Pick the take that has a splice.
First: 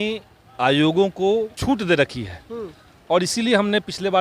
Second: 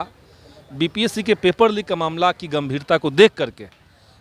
first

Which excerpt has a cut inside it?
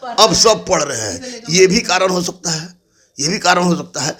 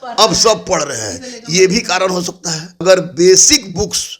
second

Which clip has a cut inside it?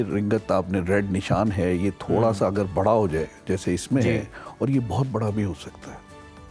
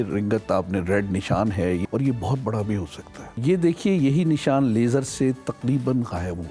second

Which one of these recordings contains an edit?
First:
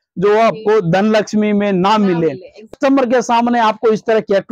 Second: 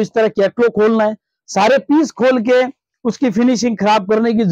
first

